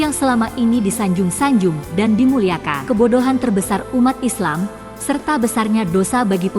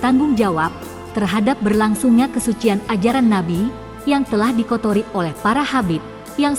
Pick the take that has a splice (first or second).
first